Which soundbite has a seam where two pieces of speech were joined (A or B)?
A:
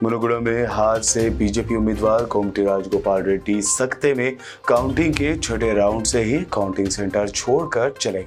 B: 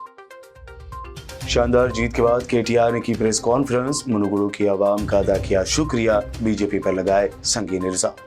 B